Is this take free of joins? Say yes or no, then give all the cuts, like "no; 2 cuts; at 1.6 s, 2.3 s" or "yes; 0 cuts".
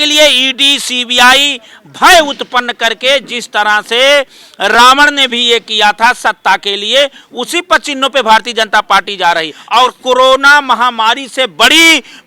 no; 1 cut; at 9.5 s